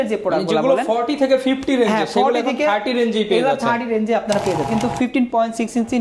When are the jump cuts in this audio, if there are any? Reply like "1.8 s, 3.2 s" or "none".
4.7 s